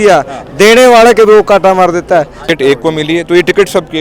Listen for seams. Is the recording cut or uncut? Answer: cut